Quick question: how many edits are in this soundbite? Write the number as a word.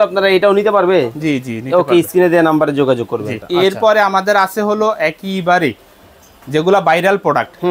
one